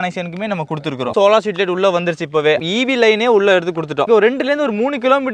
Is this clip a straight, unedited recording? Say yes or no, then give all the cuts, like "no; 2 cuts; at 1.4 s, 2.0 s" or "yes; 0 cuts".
no; 3 cuts; at 1.1 s, 2.6 s, 4.1 s